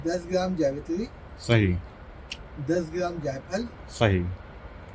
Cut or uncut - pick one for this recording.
uncut